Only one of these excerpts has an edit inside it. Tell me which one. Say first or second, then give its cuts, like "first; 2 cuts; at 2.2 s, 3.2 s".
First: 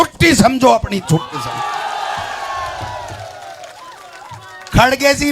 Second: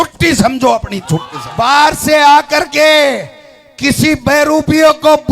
second; 1 cut; at 1.4 s